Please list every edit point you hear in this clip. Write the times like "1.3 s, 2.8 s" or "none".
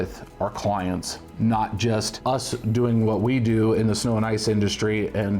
2.1 s